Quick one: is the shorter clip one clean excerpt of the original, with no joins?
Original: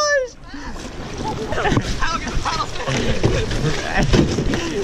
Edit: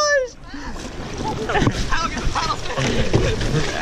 no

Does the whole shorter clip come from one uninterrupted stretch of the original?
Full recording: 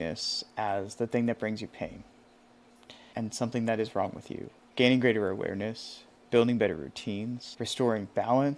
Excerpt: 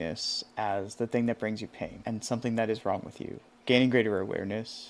no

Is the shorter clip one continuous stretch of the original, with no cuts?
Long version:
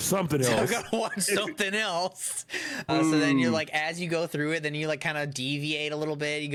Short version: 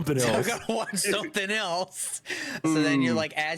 no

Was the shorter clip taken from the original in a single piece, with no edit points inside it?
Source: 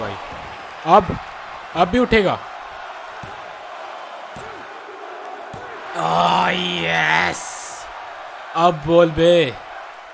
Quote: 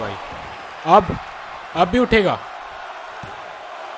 yes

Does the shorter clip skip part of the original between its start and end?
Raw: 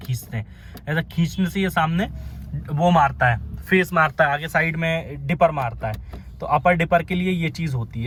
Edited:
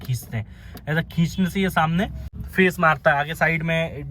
yes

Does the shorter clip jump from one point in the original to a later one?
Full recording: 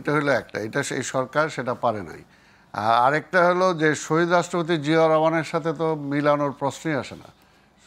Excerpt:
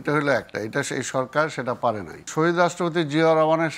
yes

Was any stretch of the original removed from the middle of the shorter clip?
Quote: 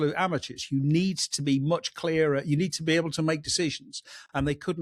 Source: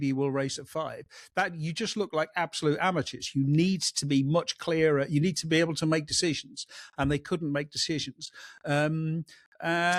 no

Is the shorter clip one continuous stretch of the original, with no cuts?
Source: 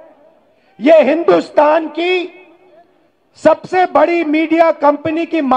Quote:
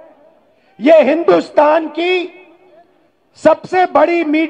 yes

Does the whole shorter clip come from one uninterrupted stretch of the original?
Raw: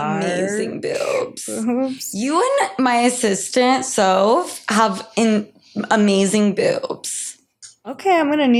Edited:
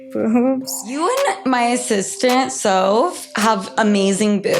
no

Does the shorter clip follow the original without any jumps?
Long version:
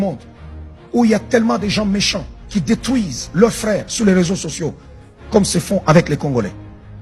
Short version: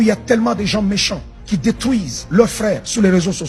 yes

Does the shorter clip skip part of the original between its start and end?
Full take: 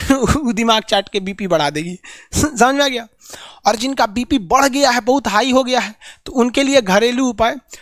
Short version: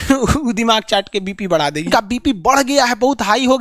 yes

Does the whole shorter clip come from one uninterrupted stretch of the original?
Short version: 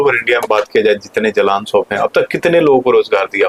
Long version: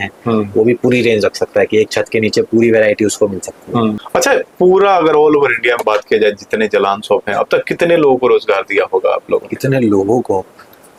yes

